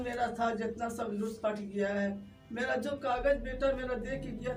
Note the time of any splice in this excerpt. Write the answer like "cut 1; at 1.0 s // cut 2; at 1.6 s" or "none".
none